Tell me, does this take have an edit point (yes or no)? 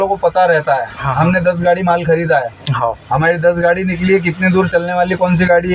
no